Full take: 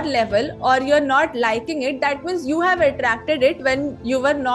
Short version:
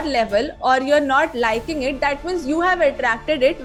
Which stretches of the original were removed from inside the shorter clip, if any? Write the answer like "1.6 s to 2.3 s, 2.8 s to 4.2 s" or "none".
none